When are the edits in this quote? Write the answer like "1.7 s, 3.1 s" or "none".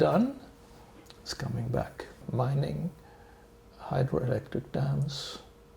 2.2 s